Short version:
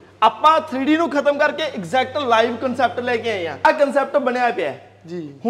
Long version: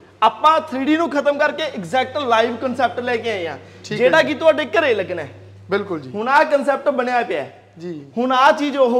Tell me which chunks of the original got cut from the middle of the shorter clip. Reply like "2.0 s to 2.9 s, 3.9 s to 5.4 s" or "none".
3.6 s to 6.4 s